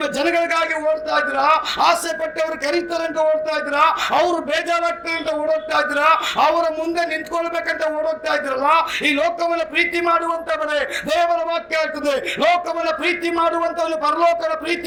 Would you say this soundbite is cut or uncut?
uncut